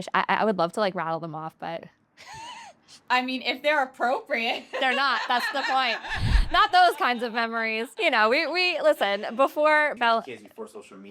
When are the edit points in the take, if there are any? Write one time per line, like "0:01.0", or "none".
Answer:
0:07.8
0:09.9